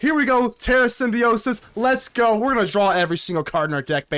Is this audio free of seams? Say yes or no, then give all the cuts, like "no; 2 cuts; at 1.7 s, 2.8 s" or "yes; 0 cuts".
yes; 0 cuts